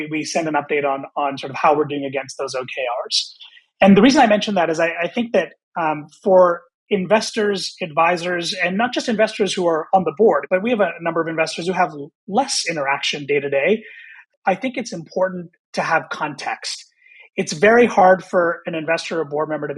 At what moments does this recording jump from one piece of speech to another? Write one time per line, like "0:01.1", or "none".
0:10.5
0:14.3